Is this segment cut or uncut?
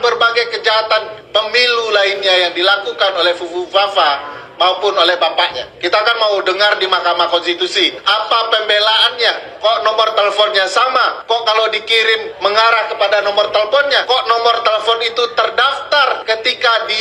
cut